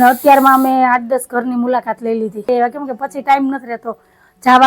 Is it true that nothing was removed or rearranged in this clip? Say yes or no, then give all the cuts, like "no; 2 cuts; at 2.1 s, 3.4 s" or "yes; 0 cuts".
no; 1 cut; at 2.5 s